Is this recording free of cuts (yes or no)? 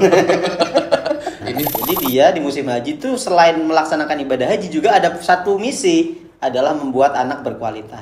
no